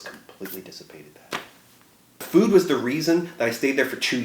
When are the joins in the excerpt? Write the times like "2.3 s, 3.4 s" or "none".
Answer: 2.2 s